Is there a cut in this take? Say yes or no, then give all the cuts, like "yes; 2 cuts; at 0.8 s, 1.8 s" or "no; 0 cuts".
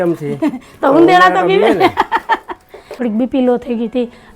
yes; 1 cut; at 2.9 s